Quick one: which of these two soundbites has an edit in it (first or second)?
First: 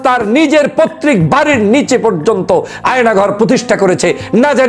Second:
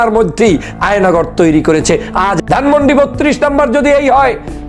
second